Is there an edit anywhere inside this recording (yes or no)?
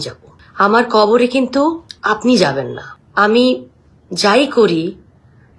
no